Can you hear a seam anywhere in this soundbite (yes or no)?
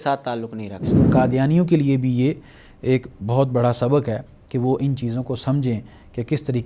yes